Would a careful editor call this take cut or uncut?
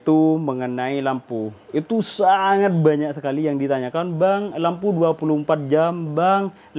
uncut